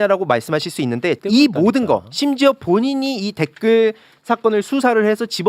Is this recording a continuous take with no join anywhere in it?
no; 1 cut; at 1.2 s

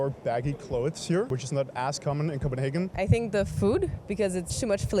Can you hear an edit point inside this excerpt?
yes; 2 cuts; at 1.3 s, 2.9 s

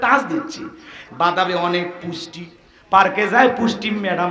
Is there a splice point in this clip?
yes; 1 cut; at 0.9 s

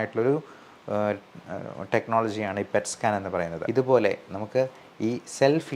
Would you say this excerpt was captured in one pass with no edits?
no; 1 cut; at 3.6 s

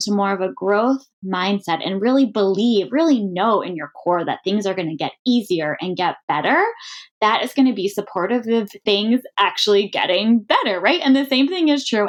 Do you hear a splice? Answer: no; 0 cuts

